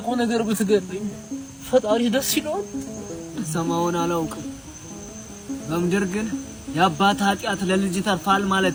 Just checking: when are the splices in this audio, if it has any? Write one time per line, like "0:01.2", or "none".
none